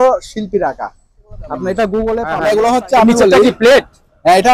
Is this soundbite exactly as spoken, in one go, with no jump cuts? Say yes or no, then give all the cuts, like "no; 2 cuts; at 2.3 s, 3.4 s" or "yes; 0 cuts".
no; 1 cut; at 2.3 s